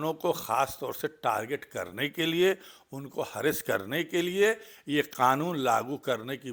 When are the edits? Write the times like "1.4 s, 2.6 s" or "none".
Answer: none